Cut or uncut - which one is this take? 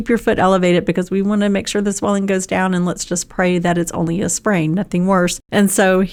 uncut